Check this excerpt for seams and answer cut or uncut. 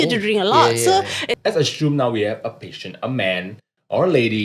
cut